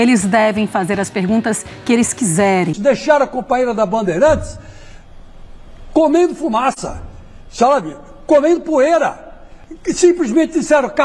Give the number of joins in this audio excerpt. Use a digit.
1